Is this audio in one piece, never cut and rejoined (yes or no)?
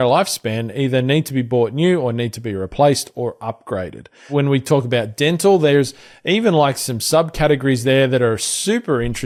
yes